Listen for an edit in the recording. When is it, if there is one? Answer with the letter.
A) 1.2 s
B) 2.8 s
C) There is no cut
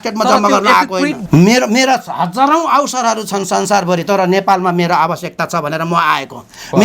A